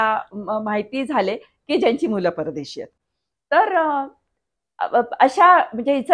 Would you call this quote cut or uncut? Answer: uncut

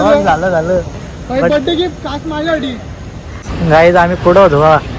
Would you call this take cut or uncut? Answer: cut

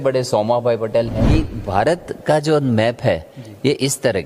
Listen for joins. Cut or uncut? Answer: cut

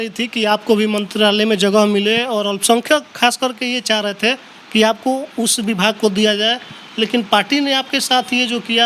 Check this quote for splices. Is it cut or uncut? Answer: uncut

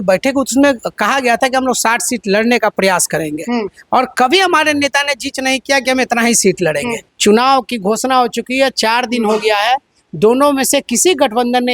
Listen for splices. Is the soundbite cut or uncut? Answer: cut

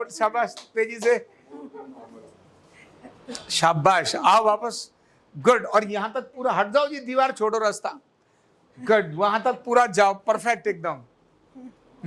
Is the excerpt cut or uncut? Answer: uncut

